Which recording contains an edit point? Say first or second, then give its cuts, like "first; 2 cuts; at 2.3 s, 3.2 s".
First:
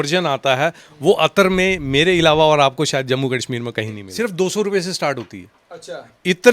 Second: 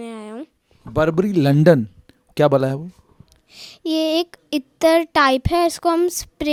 first; 1 cut; at 4.1 s